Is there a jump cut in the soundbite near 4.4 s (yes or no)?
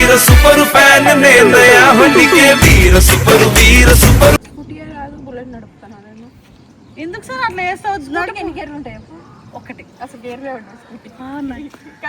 yes